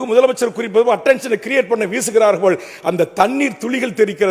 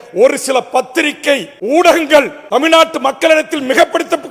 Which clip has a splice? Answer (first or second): second